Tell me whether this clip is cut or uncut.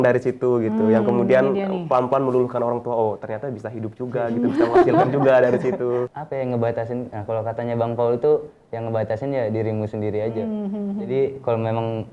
cut